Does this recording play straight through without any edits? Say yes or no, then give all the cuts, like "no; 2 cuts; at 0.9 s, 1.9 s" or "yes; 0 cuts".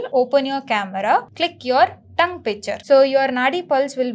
no; 2 cuts; at 1.3 s, 2.7 s